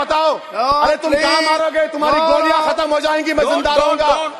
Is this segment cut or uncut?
uncut